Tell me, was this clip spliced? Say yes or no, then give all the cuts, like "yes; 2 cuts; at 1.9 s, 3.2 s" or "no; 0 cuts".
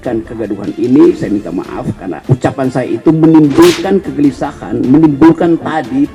no; 0 cuts